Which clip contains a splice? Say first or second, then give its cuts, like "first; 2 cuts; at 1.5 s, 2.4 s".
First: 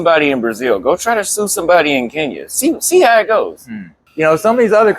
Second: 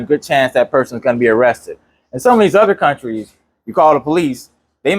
first; 1 cut; at 4.0 s